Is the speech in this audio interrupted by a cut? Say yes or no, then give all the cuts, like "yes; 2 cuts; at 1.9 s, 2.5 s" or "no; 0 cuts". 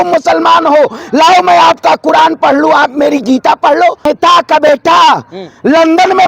yes; 1 cut; at 4.1 s